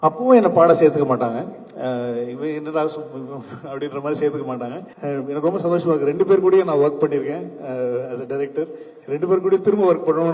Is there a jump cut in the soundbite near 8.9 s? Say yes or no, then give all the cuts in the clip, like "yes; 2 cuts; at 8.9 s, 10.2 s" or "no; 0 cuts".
no; 1 cut; at 4.9 s